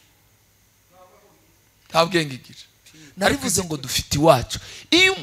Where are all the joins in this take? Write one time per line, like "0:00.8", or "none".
0:03.3